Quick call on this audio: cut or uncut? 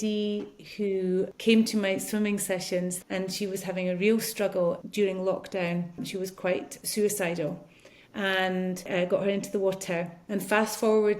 cut